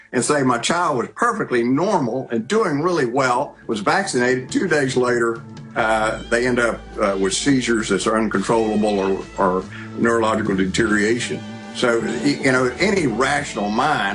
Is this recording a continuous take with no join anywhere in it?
yes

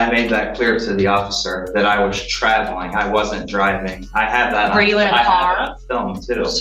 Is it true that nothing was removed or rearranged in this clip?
yes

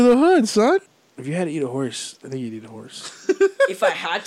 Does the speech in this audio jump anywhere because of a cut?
yes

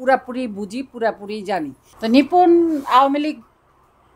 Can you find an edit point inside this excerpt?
yes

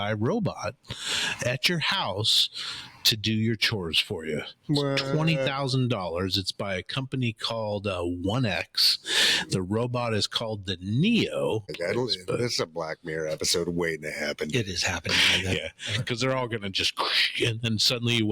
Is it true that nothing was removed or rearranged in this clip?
no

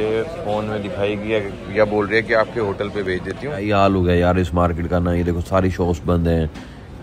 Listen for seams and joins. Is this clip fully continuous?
no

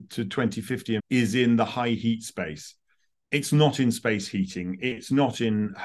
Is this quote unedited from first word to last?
no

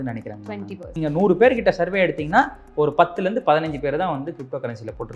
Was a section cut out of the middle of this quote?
yes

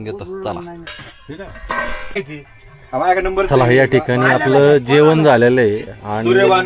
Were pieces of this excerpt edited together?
no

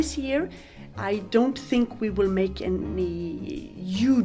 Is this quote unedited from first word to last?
no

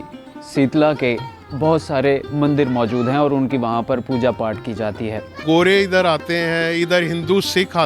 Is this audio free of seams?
no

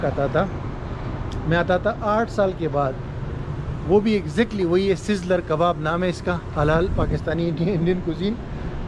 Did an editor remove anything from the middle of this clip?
no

